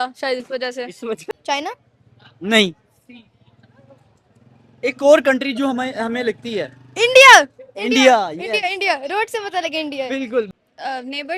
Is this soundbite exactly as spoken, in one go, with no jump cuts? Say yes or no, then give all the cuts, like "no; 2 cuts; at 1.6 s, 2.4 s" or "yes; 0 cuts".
no; 2 cuts; at 1.3 s, 10.5 s